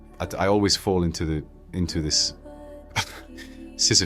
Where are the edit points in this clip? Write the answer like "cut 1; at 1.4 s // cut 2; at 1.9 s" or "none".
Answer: none